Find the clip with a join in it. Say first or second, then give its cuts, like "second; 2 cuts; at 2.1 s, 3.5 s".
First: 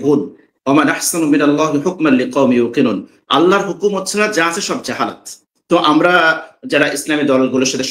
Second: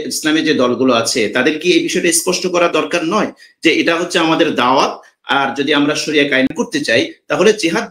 second; 1 cut; at 6.5 s